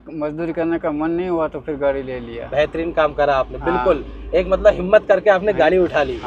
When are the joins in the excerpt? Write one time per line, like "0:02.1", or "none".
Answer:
none